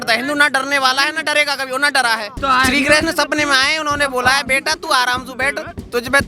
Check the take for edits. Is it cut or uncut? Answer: cut